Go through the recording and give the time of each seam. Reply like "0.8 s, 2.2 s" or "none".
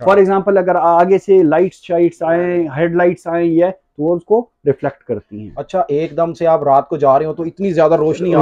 none